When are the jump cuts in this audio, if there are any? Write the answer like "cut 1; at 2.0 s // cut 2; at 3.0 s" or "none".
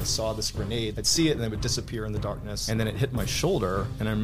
cut 1; at 1.0 s // cut 2; at 2.5 s